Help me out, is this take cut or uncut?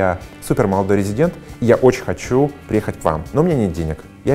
uncut